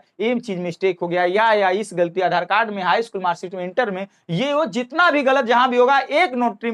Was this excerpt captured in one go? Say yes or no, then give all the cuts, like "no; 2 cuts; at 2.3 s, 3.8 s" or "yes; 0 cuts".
yes; 0 cuts